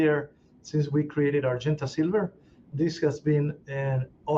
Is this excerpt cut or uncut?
uncut